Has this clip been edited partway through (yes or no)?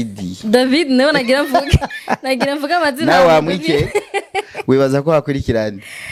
no